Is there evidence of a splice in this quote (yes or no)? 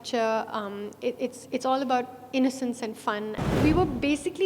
yes